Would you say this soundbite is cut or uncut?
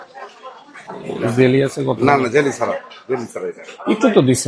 uncut